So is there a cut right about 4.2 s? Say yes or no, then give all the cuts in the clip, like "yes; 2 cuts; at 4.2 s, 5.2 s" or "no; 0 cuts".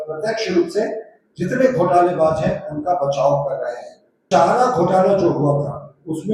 yes; 1 cut; at 4.2 s